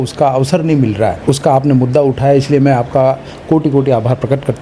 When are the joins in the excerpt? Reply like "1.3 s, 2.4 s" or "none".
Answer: none